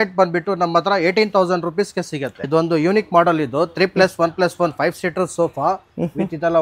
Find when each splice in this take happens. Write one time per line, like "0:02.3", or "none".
0:02.4